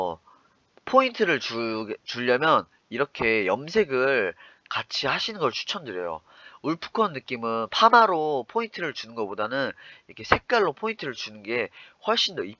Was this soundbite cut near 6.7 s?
no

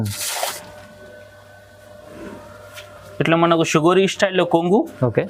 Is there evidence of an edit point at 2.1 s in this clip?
no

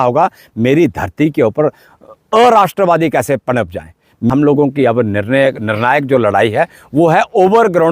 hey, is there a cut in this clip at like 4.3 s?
yes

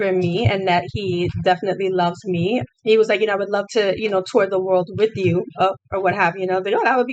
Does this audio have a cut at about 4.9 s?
no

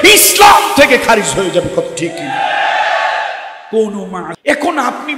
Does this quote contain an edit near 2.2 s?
no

